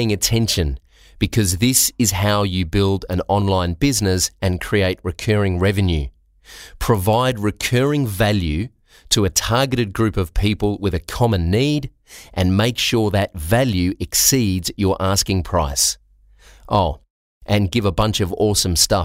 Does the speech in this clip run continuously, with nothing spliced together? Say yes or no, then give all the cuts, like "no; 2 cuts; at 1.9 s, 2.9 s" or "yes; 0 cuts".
yes; 0 cuts